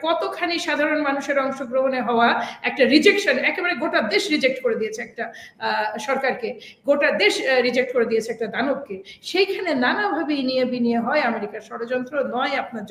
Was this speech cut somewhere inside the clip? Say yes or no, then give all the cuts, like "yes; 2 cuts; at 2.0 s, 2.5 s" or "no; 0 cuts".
no; 0 cuts